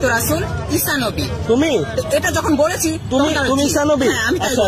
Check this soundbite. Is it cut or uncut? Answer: uncut